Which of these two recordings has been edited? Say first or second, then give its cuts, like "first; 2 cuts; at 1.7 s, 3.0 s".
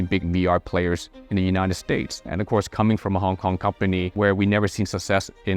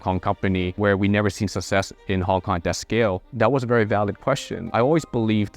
second; 2 cuts; at 3.3 s, 4.6 s